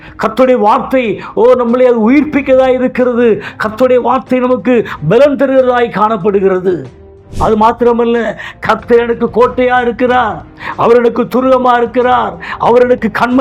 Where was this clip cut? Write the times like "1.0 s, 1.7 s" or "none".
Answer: 7.2 s